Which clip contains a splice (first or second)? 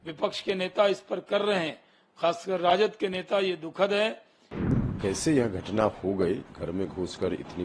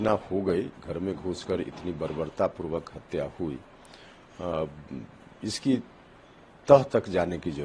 first